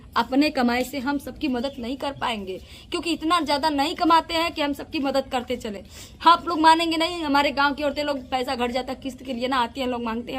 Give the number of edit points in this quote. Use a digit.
0